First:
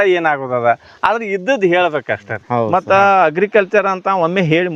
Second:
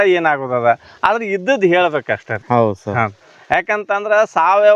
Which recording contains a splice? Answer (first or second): first